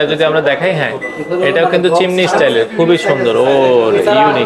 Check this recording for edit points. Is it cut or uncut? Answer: uncut